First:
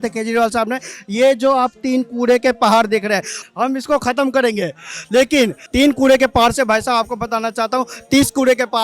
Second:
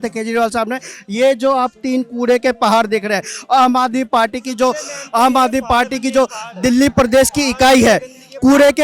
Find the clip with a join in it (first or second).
first